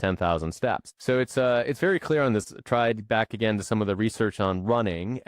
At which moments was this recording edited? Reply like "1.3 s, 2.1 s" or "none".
0.9 s, 2.5 s

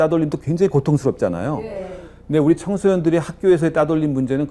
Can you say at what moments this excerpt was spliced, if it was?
none

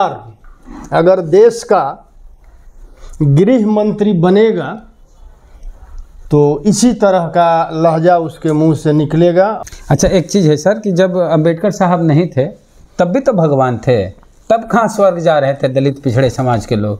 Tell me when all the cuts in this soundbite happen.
9.6 s

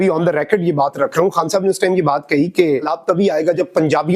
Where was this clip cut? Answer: 2.9 s

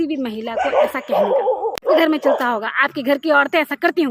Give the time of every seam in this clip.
1.7 s

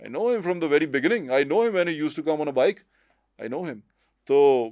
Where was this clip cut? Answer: none

